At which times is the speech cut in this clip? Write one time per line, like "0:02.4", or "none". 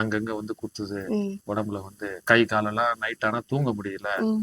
0:02.1